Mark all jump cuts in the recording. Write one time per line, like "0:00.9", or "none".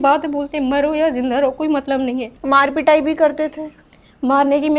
0:02.3